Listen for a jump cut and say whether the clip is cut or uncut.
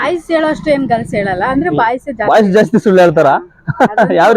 uncut